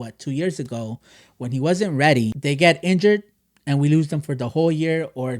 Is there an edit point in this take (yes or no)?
yes